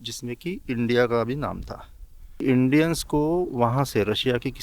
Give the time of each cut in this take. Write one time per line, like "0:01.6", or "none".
0:02.2

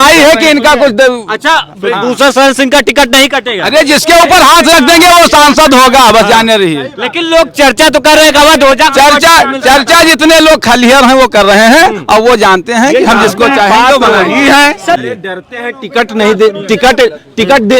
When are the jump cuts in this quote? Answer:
0:15.0

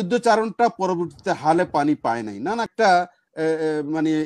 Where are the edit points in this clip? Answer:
0:02.7

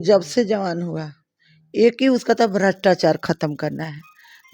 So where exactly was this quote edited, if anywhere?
none

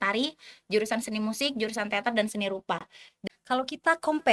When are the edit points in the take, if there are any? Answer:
0:03.0

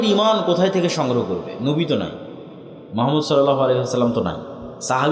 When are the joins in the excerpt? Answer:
none

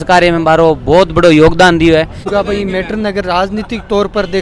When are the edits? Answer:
0:02.2

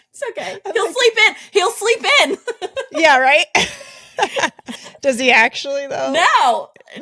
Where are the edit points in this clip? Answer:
0:04.7

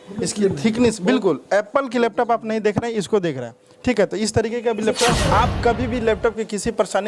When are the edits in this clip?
0:05.2

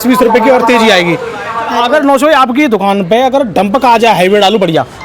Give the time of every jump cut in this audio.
0:01.7

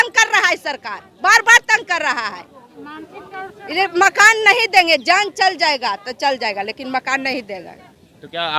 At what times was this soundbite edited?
none

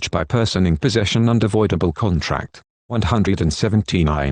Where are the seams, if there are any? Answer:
0:03.2

